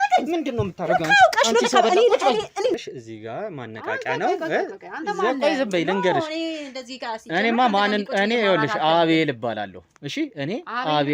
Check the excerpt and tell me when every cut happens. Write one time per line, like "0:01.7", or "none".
0:02.7